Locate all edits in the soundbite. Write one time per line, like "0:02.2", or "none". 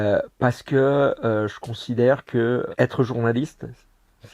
0:02.7